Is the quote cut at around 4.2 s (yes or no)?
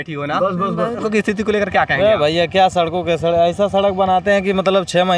no